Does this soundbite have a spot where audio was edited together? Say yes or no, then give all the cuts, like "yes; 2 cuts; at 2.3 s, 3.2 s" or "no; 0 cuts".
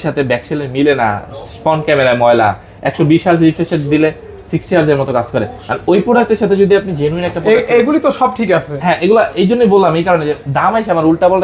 no; 0 cuts